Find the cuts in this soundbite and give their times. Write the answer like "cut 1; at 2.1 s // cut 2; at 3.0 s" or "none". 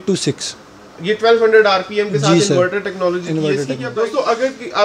cut 1; at 3.9 s